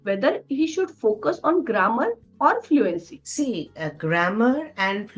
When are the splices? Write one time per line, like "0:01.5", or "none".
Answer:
none